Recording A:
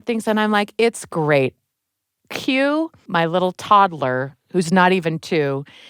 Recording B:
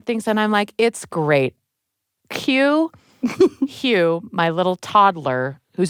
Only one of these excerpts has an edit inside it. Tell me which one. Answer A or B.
A